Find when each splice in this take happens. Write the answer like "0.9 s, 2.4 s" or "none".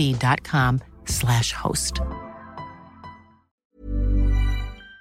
3.6 s